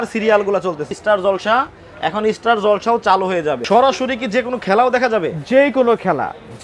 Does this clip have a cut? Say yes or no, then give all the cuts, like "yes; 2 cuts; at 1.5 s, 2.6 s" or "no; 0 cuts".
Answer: yes; 2 cuts; at 1.0 s, 3.6 s